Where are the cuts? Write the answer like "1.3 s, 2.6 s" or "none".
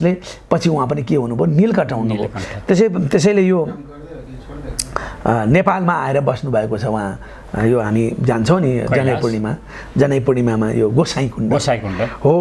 none